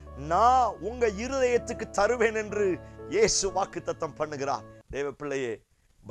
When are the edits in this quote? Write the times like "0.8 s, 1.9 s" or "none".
4.8 s